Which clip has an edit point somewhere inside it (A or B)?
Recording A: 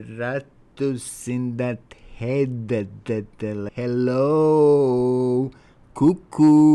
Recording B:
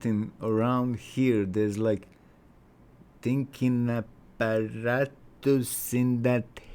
A